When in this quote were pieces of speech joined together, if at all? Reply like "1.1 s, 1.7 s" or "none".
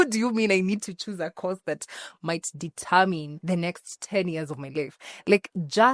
3.3 s

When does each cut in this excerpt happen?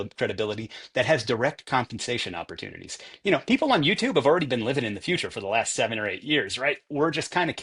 none

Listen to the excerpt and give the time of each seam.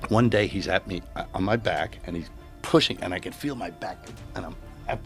none

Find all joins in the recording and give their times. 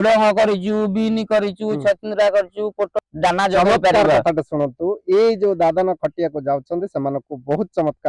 2.9 s

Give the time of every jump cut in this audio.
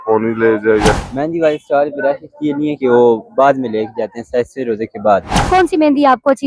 0.9 s, 5.5 s

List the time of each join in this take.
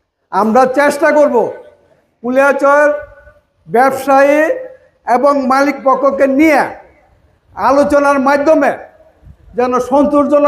none

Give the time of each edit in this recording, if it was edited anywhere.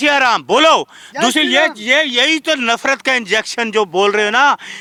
none

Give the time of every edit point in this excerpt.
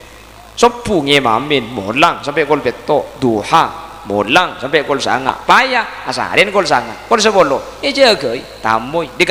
none

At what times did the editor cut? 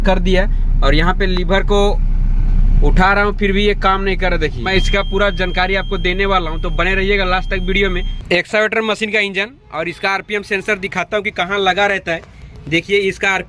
4.6 s, 8.1 s

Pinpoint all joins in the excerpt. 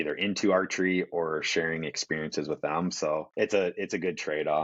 3.3 s

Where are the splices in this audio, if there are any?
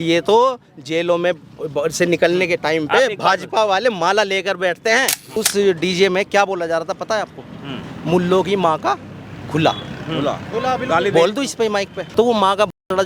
5.4 s, 12.0 s

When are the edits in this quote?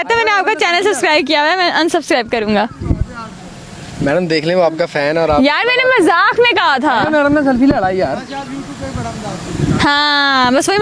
none

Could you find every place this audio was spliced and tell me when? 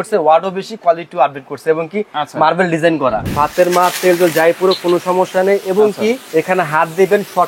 3.2 s, 6.2 s

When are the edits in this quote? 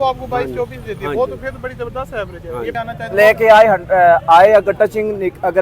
2.7 s

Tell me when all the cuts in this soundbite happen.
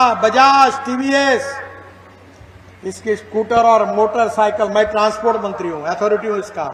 none

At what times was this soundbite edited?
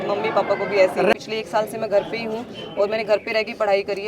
1.1 s

